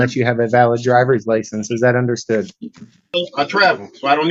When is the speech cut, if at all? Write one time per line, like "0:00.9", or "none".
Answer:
0:03.1